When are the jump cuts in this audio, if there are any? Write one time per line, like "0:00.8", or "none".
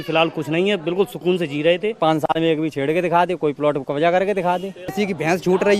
0:02.0
0:04.9